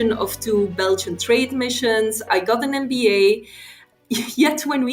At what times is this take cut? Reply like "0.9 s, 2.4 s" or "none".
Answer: 2.2 s